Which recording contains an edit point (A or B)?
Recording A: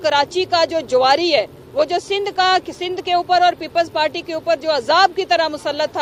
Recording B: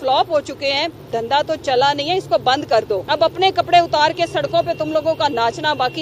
B